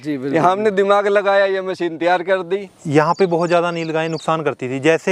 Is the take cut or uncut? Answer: cut